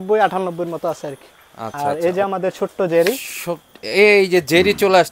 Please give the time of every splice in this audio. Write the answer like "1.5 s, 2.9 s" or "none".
1.7 s